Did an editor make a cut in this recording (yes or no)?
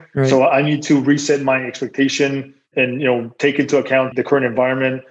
no